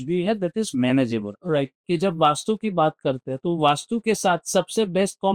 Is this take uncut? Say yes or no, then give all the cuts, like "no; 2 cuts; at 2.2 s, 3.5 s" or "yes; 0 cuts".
no; 1 cut; at 1.8 s